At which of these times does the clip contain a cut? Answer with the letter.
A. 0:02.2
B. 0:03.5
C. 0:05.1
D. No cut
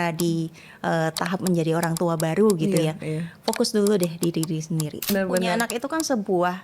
C